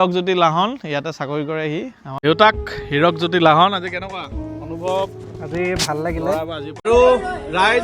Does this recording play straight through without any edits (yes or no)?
no